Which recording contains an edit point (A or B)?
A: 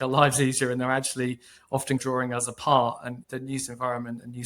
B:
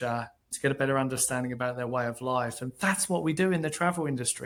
A